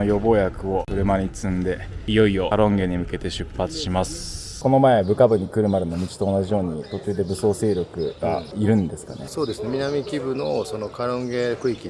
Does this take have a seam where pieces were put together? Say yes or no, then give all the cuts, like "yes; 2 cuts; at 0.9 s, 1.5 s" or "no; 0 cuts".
yes; 1 cut; at 4.5 s